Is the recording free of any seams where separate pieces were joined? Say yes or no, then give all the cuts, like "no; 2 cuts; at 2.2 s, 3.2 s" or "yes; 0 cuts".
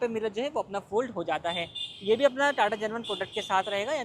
yes; 0 cuts